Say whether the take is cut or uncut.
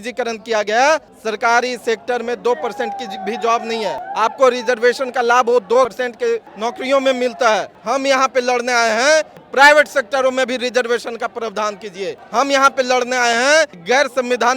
cut